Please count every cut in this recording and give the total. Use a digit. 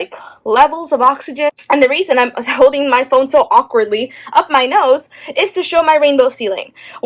1